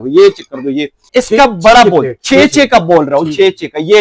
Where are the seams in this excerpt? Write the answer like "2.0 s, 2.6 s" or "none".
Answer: 1.0 s